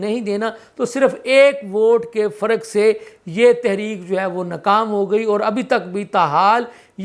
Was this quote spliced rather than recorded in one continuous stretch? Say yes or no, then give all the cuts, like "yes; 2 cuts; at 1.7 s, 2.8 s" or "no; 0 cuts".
no; 0 cuts